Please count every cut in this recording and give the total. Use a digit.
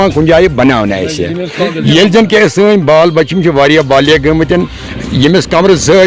0